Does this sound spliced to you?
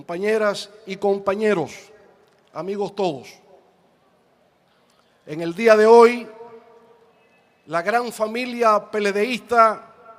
no; 0 cuts

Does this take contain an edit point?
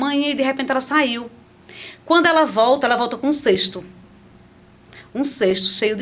no; 0 cuts

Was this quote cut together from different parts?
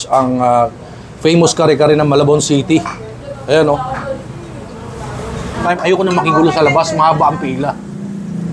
yes; 1 cut; at 5.6 s

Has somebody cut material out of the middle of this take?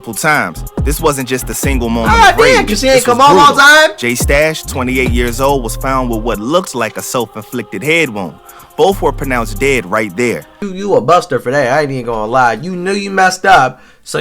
yes; 1 cut; at 10.5 s

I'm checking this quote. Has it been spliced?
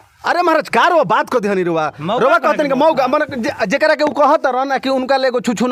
no; 0 cuts

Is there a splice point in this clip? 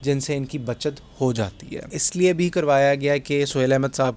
yes; 1 cut; at 2.0 s

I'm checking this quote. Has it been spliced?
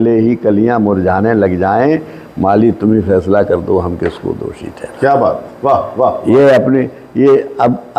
no; 0 cuts

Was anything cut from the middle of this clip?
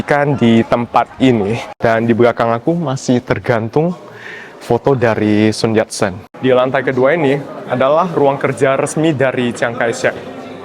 yes; 2 cuts; at 1.6 s, 6.2 s

